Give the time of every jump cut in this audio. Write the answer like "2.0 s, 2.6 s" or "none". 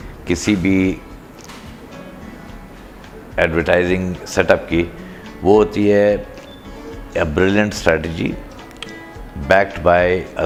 none